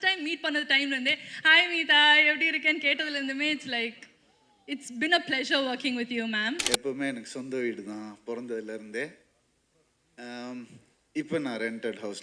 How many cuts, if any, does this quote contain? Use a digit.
1